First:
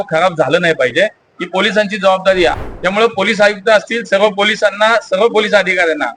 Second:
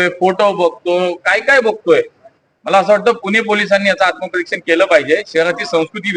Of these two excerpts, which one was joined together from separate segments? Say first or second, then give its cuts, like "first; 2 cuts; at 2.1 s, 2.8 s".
first; 1 cut; at 2.6 s